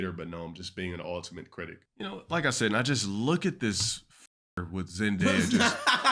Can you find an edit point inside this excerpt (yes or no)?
yes